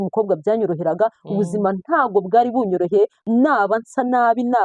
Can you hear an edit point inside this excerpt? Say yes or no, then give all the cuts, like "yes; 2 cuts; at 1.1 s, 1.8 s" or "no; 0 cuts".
yes; 1 cut; at 3.2 s